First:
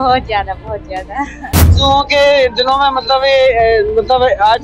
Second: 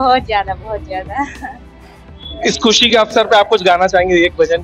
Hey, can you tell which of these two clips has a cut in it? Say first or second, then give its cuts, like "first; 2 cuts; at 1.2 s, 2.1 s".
first; 1 cut; at 1.7 s